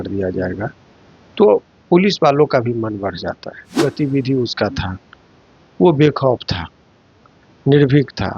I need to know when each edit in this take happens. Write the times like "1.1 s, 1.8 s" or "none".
3.7 s